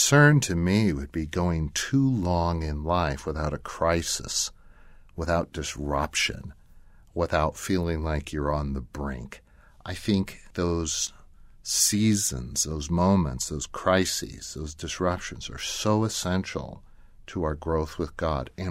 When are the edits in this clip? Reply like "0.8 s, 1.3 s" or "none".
none